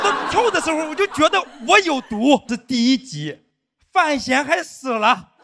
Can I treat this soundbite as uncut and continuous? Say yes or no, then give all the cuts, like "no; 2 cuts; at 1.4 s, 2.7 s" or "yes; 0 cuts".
no; 1 cut; at 2.6 s